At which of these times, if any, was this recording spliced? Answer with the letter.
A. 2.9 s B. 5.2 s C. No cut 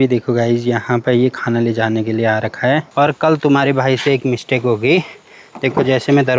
A